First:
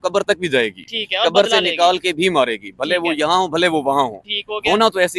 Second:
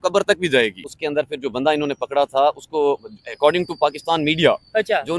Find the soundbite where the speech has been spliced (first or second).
second